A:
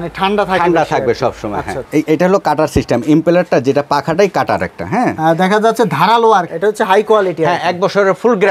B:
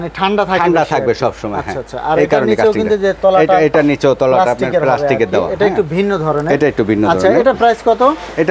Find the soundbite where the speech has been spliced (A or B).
A